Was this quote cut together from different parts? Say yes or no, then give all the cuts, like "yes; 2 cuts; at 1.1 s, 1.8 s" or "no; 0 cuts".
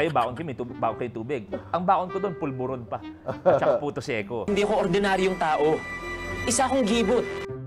no; 0 cuts